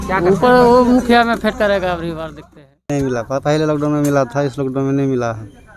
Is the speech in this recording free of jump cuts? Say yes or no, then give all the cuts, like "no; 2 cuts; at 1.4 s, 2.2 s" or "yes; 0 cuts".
no; 1 cut; at 2.9 s